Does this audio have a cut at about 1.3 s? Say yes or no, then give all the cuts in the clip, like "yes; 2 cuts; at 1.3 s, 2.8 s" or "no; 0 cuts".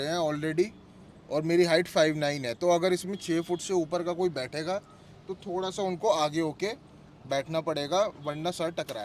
no; 0 cuts